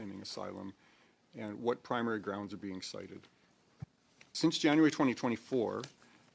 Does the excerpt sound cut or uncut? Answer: cut